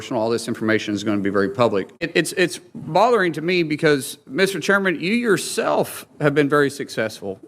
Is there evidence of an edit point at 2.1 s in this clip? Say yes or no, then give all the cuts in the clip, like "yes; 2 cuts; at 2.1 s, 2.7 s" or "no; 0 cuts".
yes; 1 cut; at 2.1 s